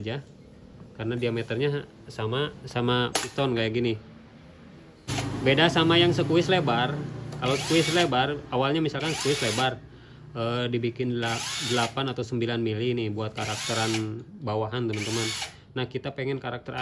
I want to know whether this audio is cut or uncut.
cut